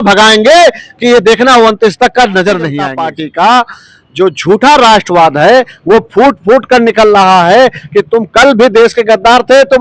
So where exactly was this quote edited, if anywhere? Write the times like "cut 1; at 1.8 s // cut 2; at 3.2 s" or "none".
cut 1; at 2.9 s